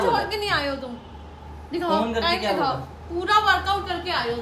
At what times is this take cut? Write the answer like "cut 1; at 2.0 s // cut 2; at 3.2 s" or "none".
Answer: none